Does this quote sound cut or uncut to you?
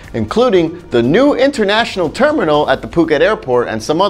uncut